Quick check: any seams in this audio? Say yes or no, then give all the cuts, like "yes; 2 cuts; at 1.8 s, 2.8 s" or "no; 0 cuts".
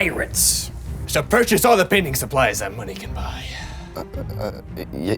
yes; 1 cut; at 1.0 s